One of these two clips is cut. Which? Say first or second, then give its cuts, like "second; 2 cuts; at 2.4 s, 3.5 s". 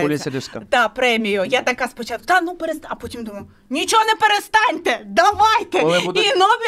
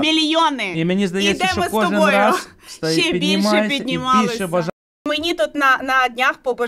second; 1 cut; at 4.7 s